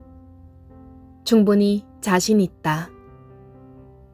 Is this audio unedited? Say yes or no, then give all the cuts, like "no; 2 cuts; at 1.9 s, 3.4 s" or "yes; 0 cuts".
no; 1 cut; at 3.2 s